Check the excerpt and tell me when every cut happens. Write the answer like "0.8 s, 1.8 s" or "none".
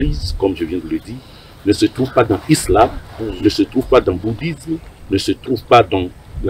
none